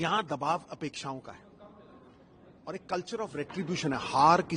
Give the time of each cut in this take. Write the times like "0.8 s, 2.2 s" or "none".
none

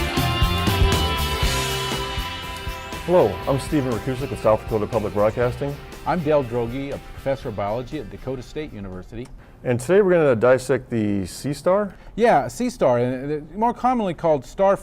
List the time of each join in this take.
3.4 s

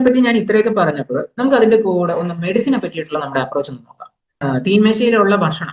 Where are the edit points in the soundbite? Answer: 4.4 s

